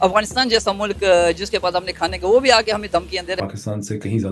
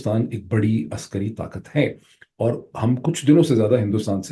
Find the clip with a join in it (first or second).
first